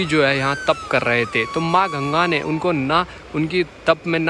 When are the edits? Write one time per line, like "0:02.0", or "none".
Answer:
none